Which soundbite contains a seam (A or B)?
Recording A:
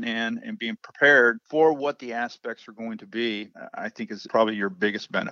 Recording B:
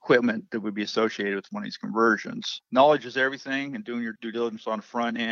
B